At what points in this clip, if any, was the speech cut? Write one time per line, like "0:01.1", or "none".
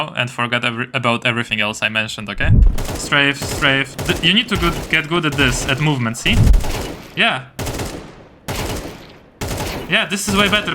0:02.7
0:03.9
0:06.5